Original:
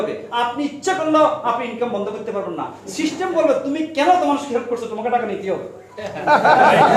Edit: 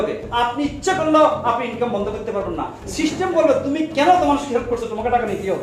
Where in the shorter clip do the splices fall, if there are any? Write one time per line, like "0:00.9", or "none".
none